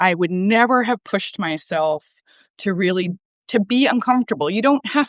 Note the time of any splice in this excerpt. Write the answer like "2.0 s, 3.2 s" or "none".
none